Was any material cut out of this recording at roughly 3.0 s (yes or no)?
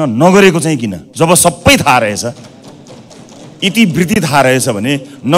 no